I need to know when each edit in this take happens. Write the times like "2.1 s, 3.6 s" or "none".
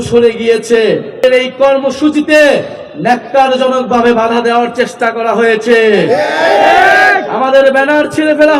1.2 s